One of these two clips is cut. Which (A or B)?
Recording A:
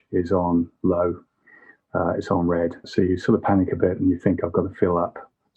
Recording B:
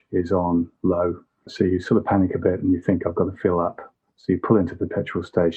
B